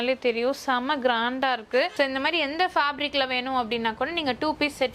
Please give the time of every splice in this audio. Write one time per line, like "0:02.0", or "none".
0:01.9